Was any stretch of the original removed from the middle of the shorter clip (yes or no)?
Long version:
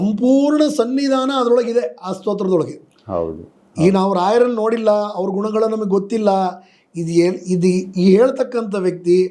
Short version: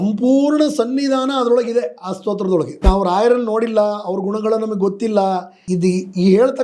yes